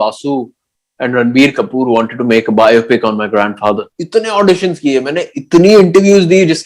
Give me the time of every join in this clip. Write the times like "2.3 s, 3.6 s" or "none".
3.9 s